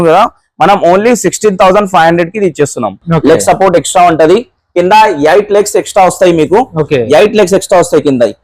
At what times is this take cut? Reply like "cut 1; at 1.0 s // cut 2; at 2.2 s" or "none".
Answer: cut 1; at 3.0 s